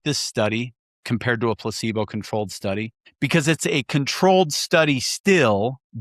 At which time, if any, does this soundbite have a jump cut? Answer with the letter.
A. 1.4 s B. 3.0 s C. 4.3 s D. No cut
B